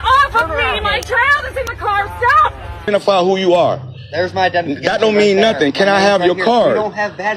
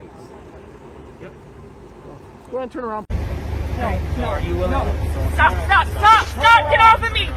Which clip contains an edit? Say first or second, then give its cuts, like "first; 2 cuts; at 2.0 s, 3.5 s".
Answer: first; 1 cut; at 2.9 s